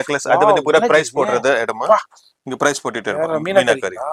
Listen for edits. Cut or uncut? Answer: uncut